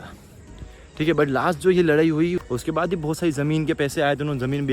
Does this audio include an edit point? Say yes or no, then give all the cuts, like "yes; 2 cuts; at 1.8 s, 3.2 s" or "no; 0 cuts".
yes; 1 cut; at 2.4 s